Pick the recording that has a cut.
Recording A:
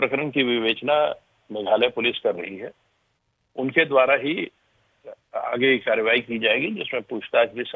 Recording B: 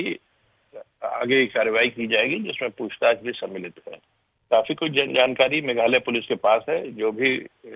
B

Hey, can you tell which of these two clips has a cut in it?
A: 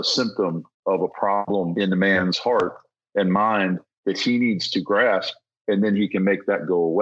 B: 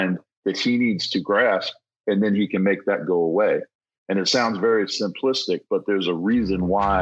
A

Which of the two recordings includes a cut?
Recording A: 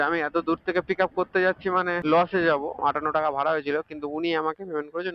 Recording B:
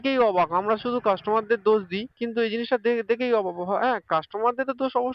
A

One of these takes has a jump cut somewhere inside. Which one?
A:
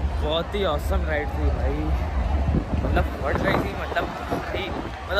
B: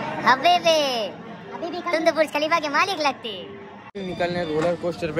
B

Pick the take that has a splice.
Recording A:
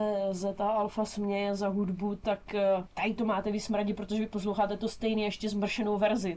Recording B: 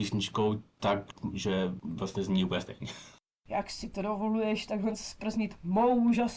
B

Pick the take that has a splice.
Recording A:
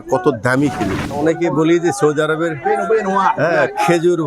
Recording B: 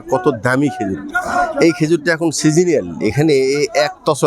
A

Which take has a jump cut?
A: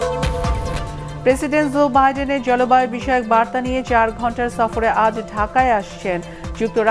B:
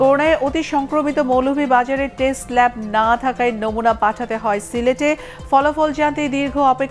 A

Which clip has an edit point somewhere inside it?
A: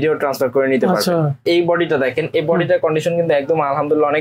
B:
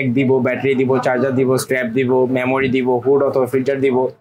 A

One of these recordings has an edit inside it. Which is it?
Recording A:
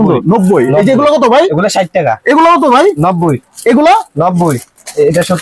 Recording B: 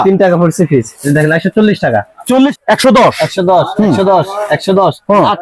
B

